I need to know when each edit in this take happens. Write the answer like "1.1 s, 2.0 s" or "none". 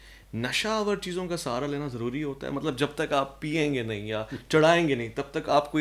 none